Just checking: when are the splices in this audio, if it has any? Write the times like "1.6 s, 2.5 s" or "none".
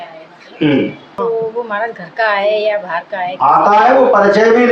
1.0 s